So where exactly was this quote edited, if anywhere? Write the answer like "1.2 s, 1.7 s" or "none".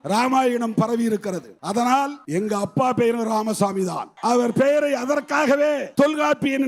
1.5 s, 2.2 s, 4.1 s, 5.9 s